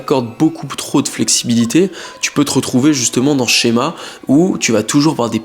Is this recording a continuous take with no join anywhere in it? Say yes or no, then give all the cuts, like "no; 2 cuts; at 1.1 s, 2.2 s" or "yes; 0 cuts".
yes; 0 cuts